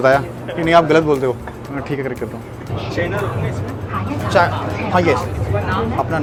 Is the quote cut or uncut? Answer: uncut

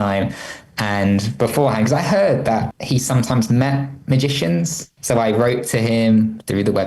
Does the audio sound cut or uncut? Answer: cut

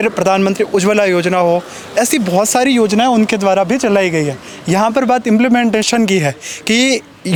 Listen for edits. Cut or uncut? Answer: uncut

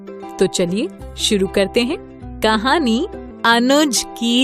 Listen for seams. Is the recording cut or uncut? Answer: cut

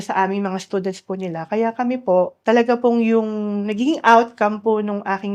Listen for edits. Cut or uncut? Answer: cut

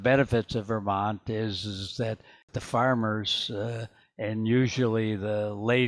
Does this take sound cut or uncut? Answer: cut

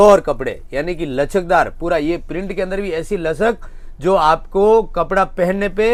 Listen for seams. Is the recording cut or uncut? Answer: uncut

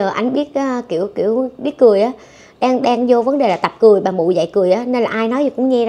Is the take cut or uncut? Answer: uncut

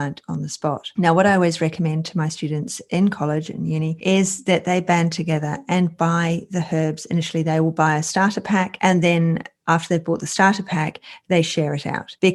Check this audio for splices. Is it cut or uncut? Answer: uncut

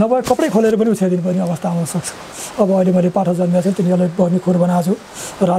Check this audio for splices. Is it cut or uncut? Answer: cut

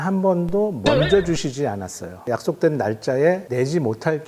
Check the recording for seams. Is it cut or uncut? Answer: uncut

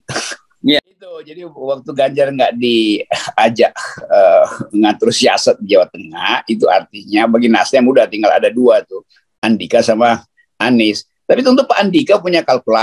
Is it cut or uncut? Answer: cut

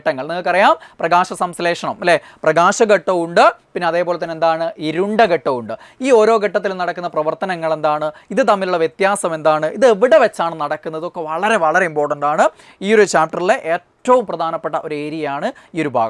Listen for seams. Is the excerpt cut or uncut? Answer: uncut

